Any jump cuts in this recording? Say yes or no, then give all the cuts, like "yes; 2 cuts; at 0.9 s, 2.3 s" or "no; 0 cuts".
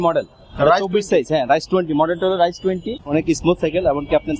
yes; 1 cut; at 2.9 s